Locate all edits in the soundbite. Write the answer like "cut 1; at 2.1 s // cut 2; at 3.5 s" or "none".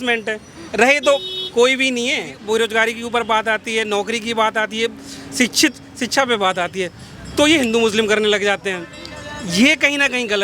cut 1; at 2.3 s